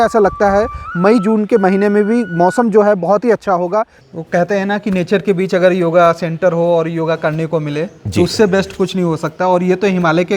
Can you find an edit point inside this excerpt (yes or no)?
yes